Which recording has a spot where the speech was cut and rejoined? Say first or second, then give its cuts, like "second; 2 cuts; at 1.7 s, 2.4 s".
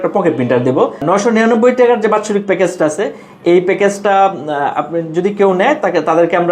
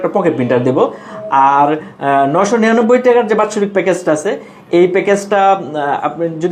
first; 1 cut; at 1.0 s